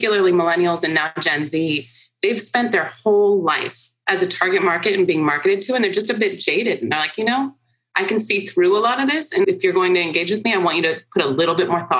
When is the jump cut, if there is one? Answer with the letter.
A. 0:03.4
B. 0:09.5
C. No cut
B